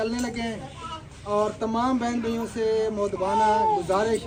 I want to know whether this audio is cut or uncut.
uncut